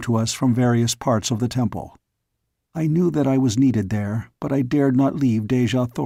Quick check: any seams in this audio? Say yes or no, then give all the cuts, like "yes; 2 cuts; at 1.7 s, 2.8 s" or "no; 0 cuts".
no; 0 cuts